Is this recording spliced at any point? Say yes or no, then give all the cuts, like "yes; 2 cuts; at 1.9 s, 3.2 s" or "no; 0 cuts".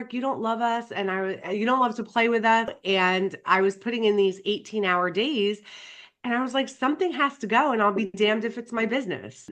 yes; 1 cut; at 2.7 s